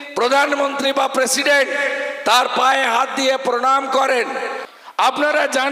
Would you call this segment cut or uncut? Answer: cut